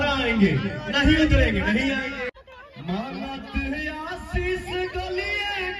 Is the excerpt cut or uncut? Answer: cut